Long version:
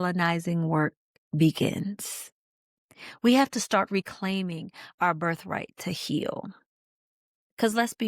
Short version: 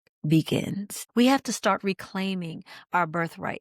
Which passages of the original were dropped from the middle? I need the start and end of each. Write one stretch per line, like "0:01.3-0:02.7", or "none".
0:02.0-0:03.0